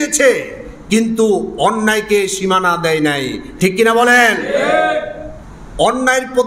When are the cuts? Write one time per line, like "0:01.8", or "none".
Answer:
none